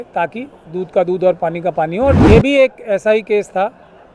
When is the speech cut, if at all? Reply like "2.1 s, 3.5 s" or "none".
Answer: 2.2 s